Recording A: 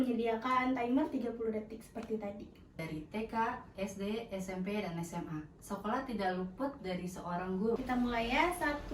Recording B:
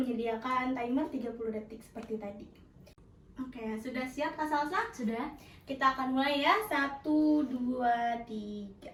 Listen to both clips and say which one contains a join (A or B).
A